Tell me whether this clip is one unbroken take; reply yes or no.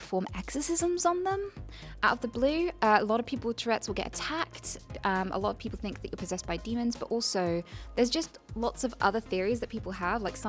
yes